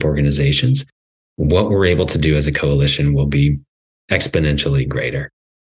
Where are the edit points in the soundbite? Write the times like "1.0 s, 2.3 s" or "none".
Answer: none